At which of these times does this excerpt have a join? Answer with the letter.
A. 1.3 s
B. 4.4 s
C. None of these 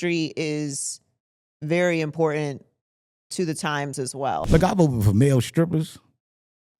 B